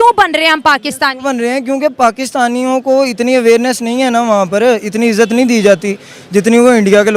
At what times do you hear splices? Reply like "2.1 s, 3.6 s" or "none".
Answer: none